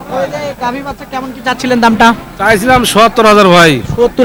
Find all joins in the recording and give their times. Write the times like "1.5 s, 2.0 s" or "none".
none